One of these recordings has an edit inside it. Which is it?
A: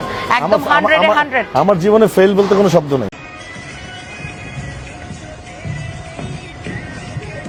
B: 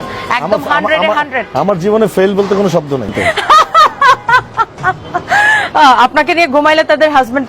B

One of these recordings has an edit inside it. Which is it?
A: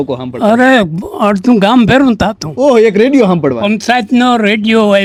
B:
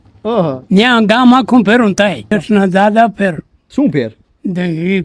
B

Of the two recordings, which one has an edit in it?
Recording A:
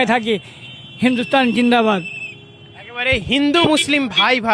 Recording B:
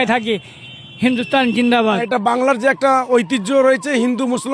B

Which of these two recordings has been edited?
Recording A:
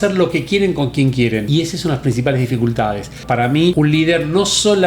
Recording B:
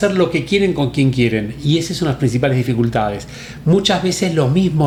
A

